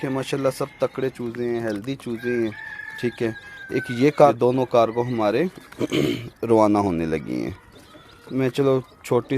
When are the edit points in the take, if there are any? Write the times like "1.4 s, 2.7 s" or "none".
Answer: 4.3 s